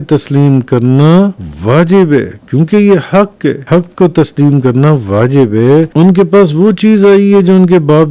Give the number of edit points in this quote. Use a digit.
3